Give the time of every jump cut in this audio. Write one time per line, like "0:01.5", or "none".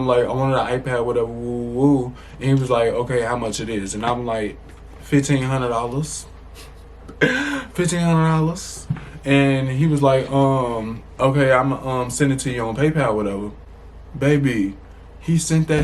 none